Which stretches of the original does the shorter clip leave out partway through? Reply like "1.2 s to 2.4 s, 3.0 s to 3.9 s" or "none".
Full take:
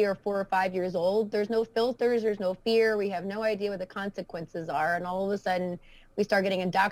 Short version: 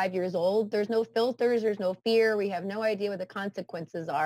none